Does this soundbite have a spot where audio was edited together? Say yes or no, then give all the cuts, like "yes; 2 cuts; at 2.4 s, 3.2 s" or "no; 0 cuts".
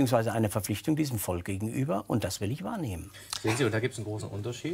no; 0 cuts